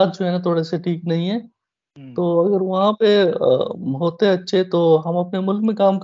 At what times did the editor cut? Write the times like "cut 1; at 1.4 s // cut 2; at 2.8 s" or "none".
none